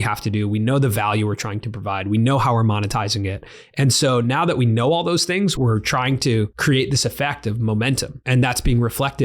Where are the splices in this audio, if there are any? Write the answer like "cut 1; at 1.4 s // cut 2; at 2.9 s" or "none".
cut 1; at 5.6 s // cut 2; at 6.5 s // cut 3; at 8.2 s